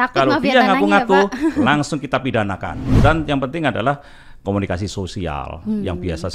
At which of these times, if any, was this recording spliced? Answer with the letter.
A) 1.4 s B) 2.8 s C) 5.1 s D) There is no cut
B